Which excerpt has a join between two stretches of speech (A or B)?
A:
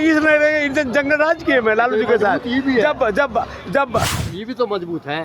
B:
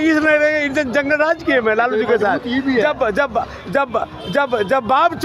A